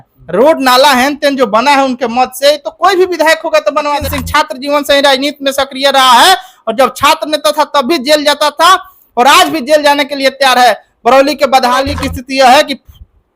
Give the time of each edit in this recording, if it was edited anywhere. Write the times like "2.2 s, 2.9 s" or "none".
3.9 s, 11.9 s

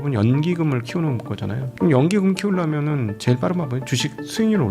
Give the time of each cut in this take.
1.7 s

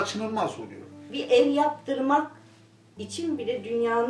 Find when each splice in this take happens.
1.1 s

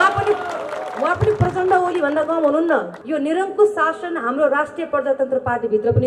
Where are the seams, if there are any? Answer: 2.9 s

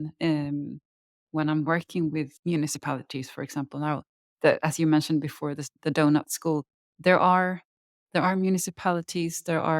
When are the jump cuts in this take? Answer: 2.3 s, 7.9 s

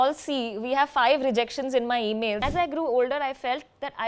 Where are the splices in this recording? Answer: 2.4 s

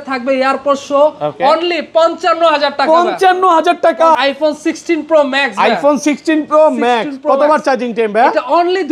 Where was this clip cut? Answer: 4.2 s

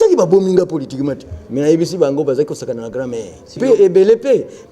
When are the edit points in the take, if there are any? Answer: 3.6 s

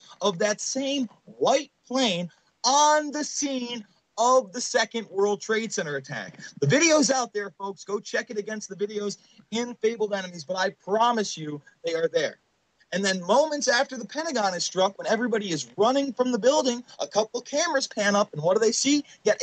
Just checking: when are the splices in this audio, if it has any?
none

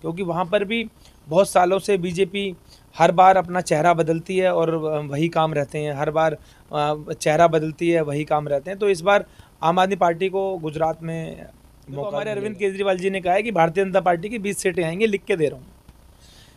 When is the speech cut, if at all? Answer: 12.2 s

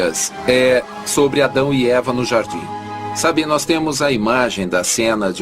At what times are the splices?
1.8 s

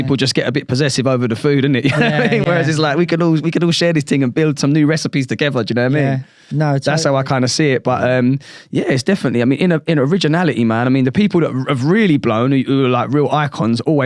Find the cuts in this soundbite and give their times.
none

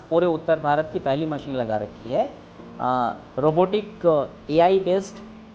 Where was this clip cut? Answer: none

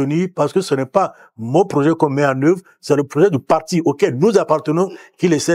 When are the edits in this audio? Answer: none

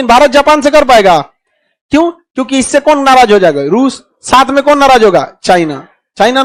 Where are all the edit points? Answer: none

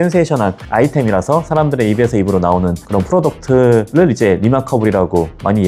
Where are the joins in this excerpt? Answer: none

